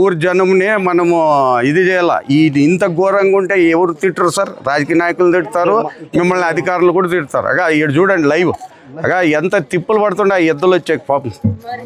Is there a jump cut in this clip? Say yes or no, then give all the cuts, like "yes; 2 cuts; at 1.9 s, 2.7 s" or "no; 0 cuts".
no; 0 cuts